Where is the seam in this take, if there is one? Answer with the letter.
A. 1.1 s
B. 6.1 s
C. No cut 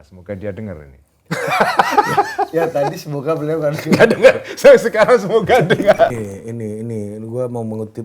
B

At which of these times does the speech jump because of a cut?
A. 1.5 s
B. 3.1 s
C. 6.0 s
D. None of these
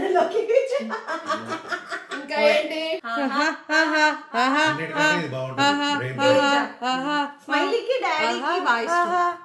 B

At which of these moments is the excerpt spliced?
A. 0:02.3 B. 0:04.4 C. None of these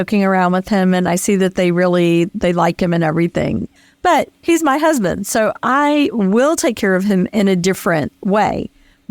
A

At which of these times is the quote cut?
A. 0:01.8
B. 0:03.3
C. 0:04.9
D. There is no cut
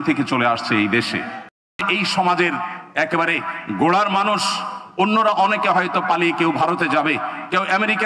A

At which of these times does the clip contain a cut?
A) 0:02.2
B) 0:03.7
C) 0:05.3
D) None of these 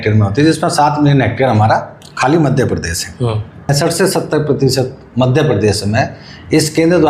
B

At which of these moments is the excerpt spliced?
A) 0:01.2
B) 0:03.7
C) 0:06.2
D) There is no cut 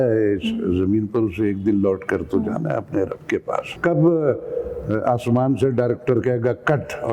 B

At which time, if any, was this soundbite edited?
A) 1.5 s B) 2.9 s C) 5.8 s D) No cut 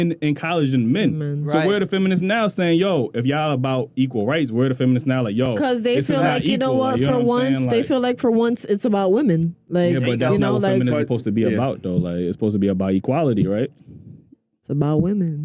D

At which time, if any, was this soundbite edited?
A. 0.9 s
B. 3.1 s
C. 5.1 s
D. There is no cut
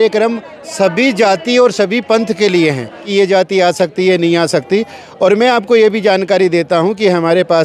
B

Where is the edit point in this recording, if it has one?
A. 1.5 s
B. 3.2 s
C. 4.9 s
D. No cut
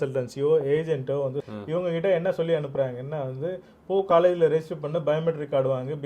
A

